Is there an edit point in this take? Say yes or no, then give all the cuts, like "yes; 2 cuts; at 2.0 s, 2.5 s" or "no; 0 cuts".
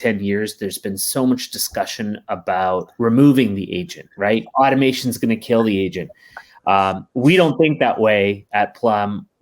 yes; 2 cuts; at 2.9 s, 4.5 s